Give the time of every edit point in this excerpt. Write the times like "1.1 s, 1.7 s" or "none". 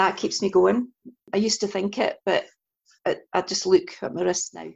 1.2 s